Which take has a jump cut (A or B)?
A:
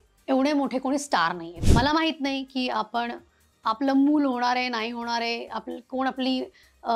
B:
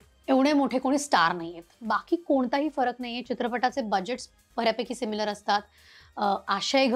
A